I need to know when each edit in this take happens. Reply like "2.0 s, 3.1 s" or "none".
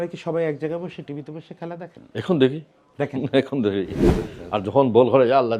4.0 s